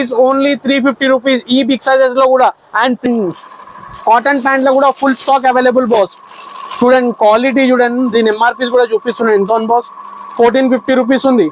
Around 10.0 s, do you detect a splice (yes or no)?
no